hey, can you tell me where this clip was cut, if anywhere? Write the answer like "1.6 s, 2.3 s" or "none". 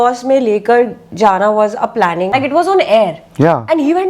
2.3 s